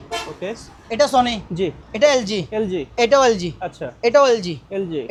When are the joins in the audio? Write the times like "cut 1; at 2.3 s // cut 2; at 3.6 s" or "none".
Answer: none